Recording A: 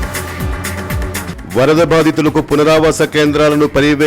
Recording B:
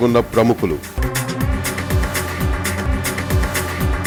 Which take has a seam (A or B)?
A